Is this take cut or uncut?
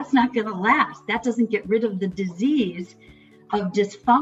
uncut